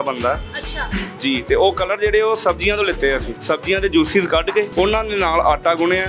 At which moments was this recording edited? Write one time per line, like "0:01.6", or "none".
0:03.3
0:04.7

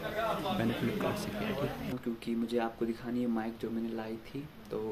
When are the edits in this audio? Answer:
0:02.0

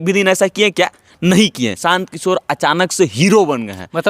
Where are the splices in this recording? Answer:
0:01.8

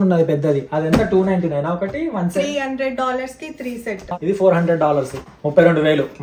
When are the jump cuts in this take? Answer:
0:04.1
0:05.2

